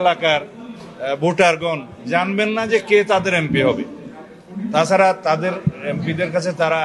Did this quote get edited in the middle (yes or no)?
no